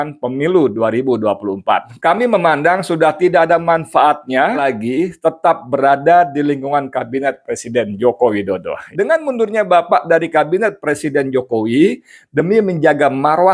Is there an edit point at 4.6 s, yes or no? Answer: yes